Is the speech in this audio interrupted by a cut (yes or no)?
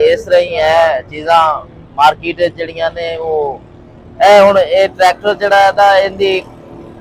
no